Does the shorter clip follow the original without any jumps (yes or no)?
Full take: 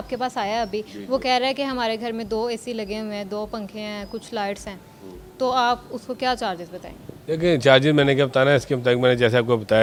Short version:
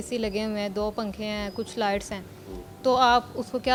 yes